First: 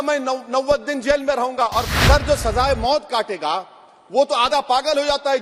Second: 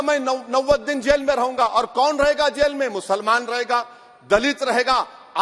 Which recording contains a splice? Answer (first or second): first